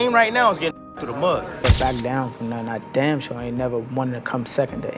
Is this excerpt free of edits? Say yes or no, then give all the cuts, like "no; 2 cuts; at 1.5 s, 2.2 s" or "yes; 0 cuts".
no; 1 cut; at 1.6 s